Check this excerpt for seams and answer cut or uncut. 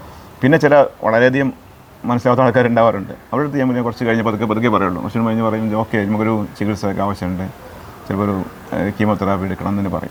uncut